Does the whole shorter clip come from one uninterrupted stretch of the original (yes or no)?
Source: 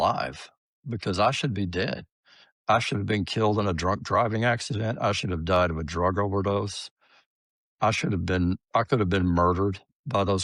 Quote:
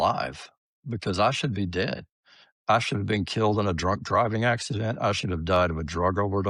yes